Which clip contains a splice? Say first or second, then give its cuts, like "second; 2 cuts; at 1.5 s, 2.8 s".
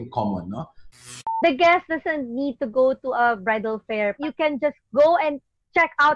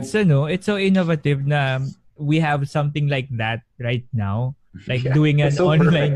first; 2 cuts; at 1.0 s, 4.2 s